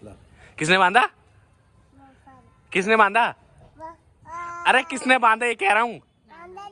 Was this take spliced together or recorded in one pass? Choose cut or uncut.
uncut